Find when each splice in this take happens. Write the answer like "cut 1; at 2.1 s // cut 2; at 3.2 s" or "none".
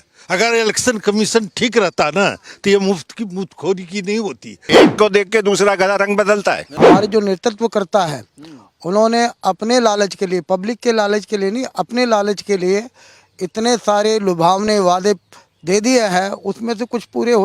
cut 1; at 4.6 s // cut 2; at 6.7 s